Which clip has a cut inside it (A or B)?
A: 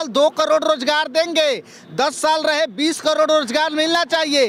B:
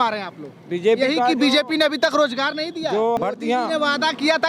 B